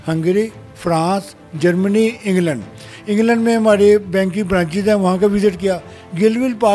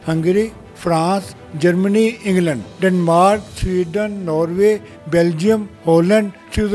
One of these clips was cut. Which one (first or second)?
second